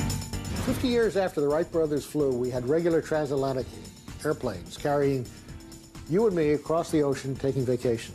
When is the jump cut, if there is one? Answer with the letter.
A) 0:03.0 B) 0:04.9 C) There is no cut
C